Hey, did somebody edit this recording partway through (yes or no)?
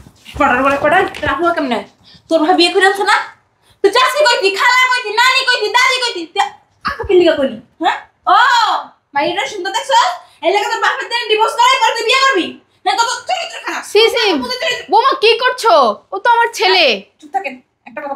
no